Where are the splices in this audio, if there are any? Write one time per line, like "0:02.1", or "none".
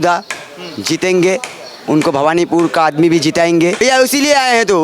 0:03.8